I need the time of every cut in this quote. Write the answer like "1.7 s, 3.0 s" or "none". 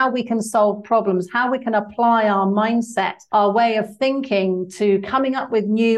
3.2 s